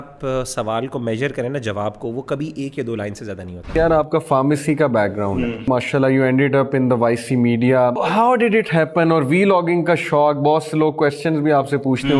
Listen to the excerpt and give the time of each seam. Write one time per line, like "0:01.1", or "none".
0:03.7
0:05.7
0:08.0